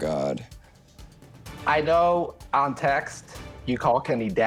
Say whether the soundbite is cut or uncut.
uncut